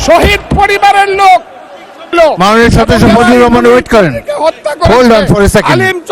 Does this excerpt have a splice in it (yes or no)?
yes